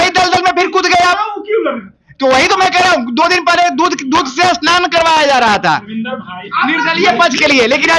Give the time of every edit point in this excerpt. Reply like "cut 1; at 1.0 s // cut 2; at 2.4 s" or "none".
none

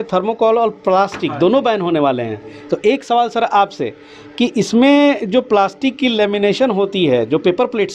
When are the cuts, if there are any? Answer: none

